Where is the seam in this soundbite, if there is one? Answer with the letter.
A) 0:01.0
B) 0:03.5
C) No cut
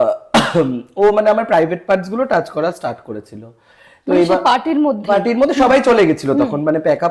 C